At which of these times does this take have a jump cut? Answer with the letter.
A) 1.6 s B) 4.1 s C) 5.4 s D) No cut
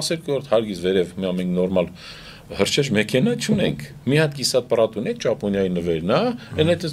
D